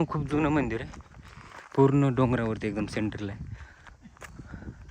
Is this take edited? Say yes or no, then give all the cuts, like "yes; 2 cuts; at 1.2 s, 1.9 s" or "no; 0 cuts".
no; 0 cuts